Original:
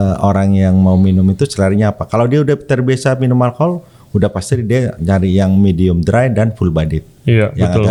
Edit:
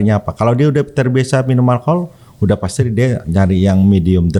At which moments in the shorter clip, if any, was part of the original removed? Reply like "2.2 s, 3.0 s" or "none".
none